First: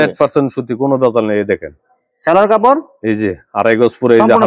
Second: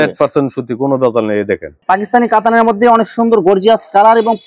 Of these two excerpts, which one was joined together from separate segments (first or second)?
second